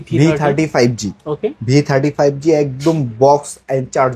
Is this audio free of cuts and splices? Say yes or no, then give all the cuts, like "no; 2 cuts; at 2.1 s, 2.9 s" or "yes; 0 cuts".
yes; 0 cuts